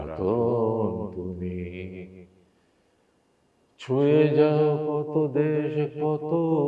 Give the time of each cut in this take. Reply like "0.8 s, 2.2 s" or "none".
none

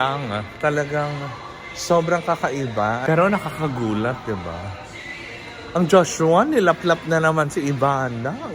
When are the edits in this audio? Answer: 3.0 s

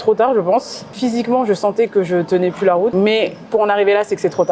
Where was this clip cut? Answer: 1.0 s, 2.9 s

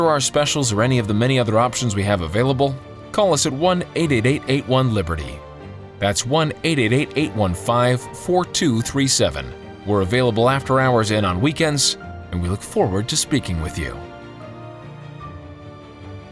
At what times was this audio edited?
13.9 s

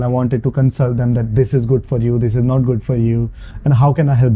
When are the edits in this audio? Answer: none

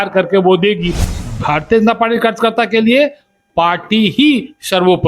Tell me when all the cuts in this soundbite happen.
1.2 s

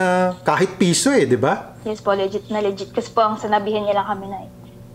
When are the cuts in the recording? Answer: 1.7 s

